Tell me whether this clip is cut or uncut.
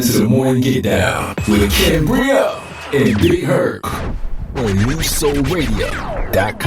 uncut